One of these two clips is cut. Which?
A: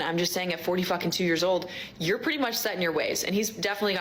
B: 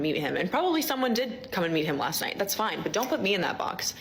B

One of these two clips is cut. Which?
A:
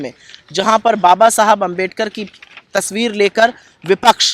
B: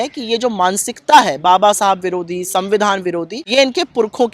B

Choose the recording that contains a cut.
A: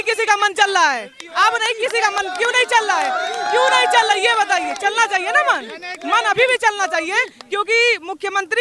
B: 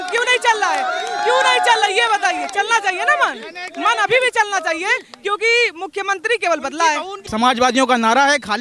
B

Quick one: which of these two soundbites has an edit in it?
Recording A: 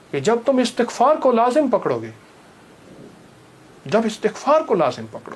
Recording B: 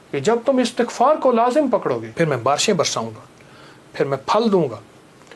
B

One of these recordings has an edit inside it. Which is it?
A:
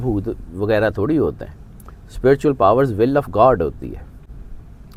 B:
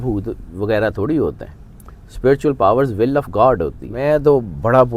B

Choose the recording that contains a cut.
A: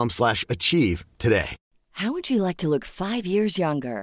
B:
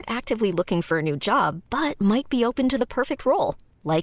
A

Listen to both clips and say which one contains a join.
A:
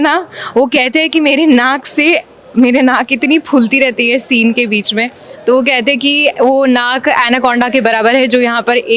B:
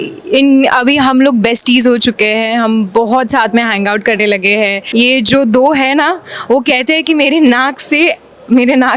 B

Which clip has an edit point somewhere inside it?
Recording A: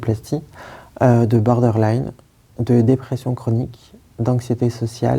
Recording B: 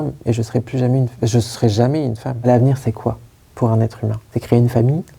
B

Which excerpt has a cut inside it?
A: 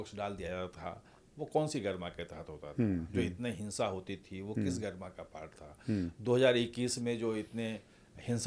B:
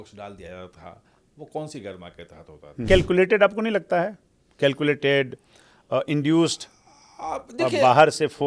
B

